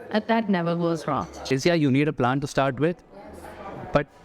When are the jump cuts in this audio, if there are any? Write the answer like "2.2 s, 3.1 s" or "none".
1.3 s